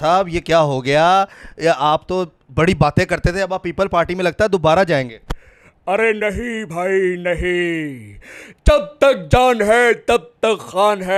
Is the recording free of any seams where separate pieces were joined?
yes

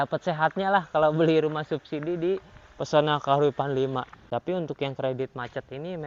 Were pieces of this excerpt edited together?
yes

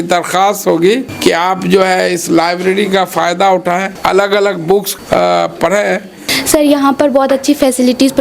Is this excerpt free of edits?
no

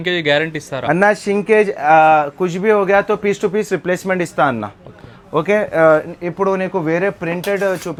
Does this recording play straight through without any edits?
yes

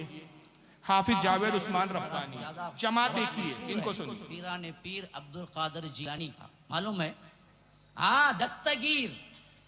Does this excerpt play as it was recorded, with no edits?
no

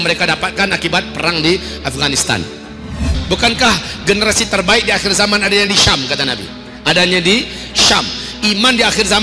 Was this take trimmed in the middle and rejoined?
yes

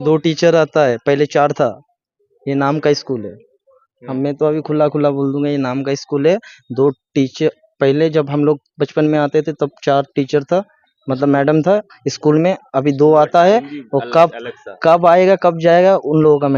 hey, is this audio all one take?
yes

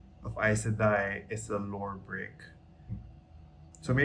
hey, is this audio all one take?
no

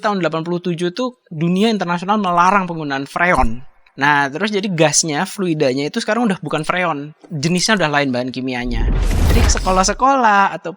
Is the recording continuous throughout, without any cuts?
no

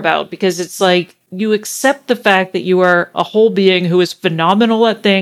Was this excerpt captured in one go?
no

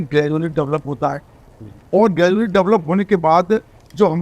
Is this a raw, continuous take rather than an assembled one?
yes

